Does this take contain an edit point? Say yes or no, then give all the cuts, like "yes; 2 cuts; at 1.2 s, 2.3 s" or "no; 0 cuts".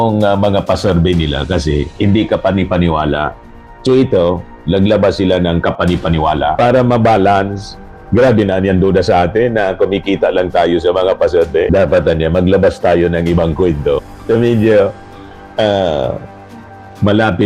no; 0 cuts